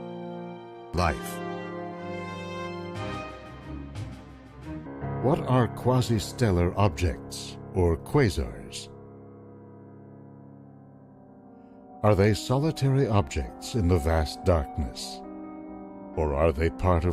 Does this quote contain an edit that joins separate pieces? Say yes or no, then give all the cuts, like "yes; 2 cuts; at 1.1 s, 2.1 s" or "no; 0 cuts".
no; 0 cuts